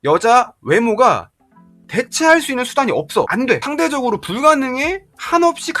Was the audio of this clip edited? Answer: yes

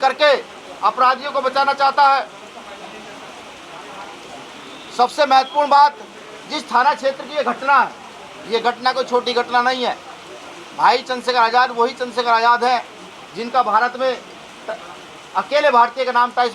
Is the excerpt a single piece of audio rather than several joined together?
yes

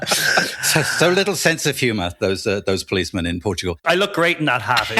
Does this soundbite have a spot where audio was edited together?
yes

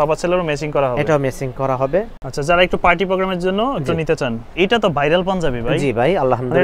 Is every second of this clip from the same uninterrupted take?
no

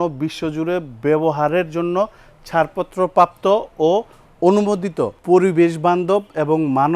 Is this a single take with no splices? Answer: no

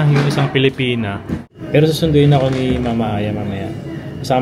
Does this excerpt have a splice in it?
yes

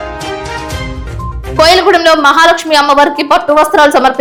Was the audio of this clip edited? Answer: no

